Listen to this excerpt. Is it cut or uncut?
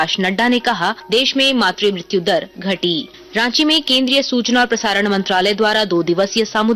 uncut